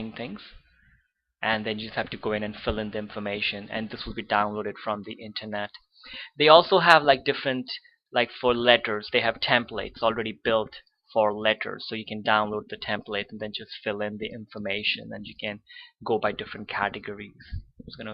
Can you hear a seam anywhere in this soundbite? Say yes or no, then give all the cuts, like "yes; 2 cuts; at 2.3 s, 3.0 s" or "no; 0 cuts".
yes; 1 cut; at 12.2 s